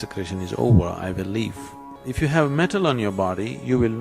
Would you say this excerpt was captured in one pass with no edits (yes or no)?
no